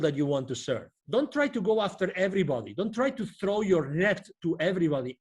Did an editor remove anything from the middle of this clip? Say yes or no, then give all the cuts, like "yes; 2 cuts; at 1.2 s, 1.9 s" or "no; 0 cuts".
yes; 1 cut; at 0.9 s